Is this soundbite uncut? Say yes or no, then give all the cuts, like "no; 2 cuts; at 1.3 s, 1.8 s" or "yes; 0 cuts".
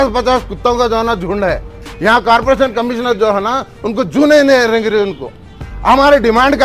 no; 1 cut; at 1.8 s